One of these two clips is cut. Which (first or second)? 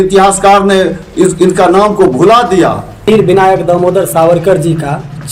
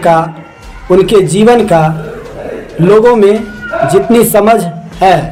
first